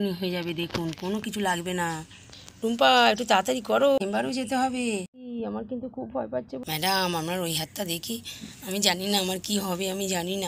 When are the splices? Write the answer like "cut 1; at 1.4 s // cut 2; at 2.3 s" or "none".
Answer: cut 1; at 4.0 s // cut 2; at 5.2 s // cut 3; at 6.6 s